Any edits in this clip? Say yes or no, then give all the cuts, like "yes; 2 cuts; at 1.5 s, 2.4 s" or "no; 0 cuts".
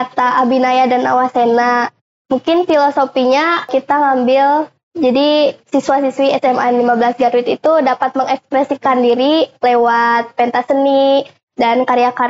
yes; 1 cut; at 3.7 s